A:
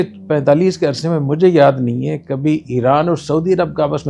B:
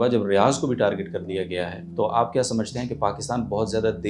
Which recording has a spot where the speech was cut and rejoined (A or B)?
B